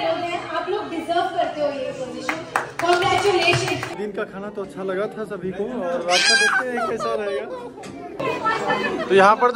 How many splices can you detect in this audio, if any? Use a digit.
2